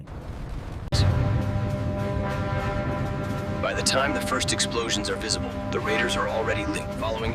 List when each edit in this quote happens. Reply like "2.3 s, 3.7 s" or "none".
none